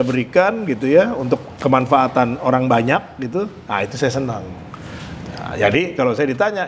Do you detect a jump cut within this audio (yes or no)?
no